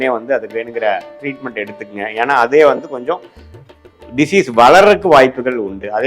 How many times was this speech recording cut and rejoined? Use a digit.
0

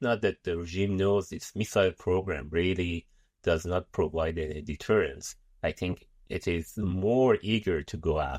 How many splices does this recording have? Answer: 0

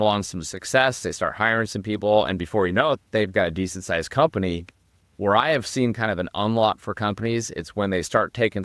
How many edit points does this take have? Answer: 0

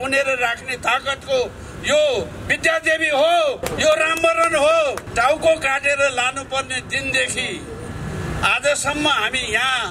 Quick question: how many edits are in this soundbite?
2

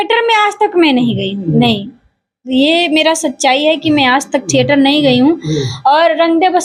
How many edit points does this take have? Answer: 0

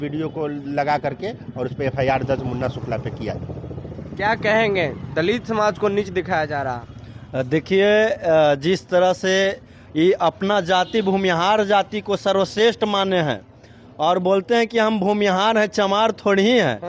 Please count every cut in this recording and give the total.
0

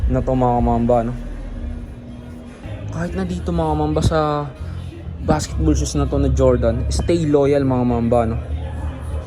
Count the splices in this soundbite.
1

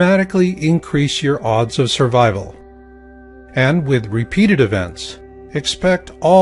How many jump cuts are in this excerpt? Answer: 1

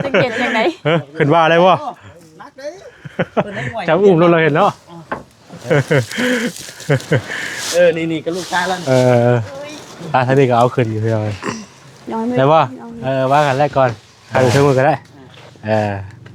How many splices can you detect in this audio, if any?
1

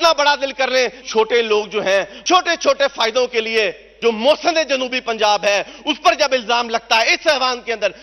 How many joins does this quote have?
3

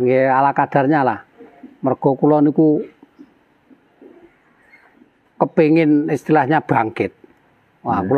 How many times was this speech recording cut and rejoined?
0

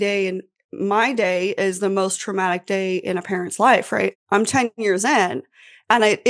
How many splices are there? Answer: 1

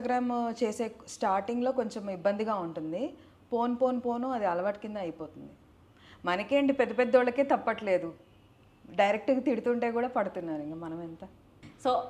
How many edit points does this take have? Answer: 0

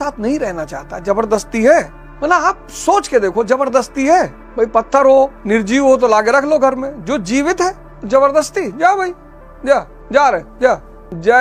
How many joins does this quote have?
0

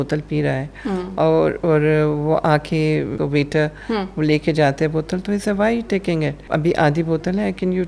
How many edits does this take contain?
2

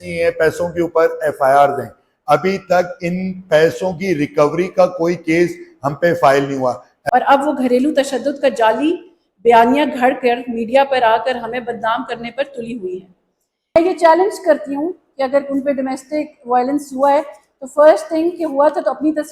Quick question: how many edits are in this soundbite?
2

